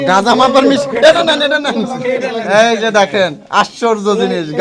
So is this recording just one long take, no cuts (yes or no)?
yes